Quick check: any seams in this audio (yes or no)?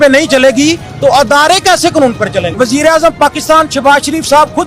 yes